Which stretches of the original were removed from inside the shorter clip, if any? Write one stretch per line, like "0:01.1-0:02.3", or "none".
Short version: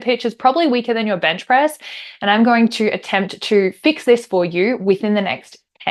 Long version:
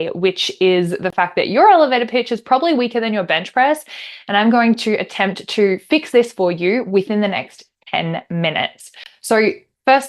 none